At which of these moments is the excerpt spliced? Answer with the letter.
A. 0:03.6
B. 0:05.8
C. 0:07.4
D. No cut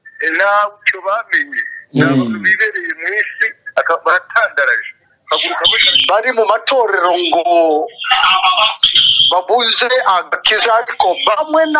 B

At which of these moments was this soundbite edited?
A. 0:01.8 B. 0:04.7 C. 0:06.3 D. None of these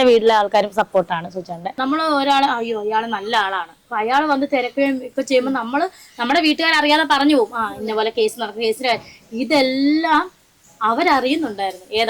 A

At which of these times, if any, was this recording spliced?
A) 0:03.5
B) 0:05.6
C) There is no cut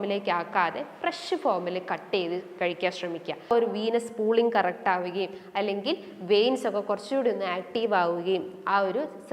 A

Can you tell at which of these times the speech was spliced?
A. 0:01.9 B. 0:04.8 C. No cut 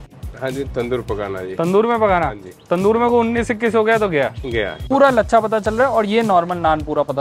B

